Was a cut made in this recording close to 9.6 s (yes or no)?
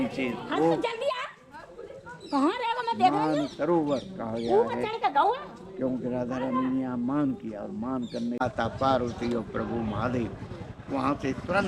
no